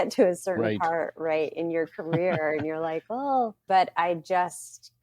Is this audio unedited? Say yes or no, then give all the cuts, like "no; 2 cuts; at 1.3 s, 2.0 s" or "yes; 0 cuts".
no; 1 cut; at 3.6 s